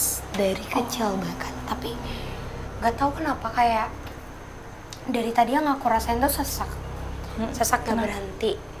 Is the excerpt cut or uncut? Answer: uncut